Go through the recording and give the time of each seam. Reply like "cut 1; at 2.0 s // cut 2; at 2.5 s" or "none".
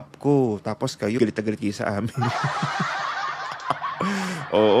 none